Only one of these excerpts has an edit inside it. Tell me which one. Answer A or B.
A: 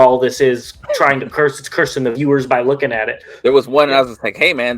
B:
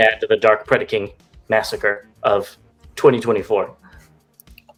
A